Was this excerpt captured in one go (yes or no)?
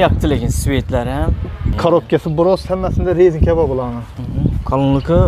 no